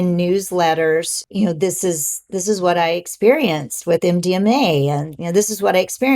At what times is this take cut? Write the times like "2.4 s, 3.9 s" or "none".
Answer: 1.2 s